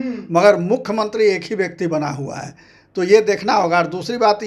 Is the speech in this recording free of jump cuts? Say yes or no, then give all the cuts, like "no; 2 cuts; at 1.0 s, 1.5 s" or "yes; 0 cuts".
yes; 0 cuts